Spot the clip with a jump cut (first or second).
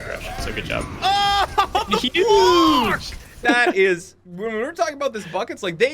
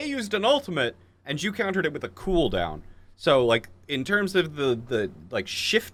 first